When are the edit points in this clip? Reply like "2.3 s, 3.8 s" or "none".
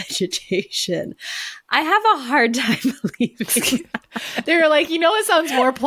4.3 s

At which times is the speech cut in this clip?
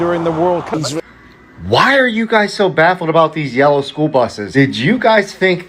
0.8 s, 4.4 s

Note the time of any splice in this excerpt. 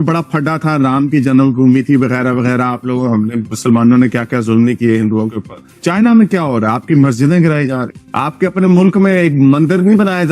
none

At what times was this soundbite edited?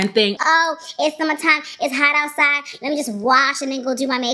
none

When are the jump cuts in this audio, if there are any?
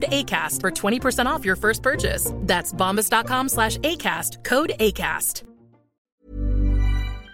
6.1 s

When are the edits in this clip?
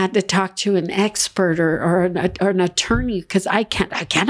none

